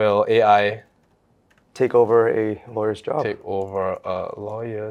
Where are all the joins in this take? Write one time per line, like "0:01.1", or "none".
none